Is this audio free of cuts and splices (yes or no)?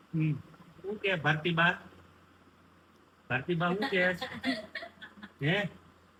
yes